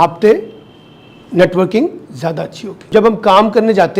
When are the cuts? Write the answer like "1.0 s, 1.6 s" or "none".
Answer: 2.9 s